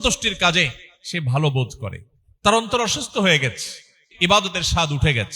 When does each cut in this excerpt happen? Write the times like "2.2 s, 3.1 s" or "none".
4.1 s